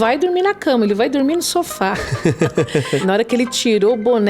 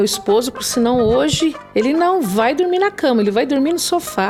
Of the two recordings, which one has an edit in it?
first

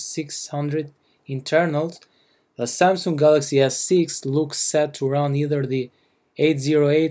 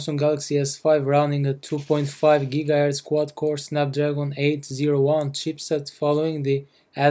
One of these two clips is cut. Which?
second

